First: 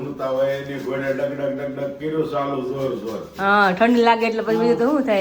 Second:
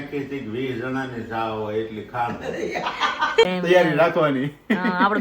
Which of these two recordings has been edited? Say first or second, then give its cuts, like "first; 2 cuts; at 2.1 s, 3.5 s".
second; 1 cut; at 3.4 s